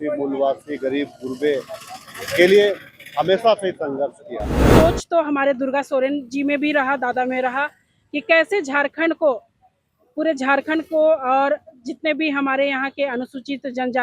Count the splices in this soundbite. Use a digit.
1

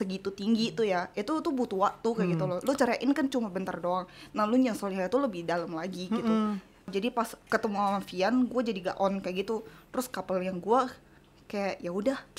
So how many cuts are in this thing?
1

